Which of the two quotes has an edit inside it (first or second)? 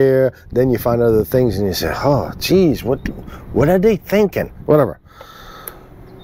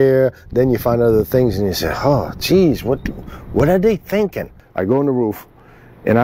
second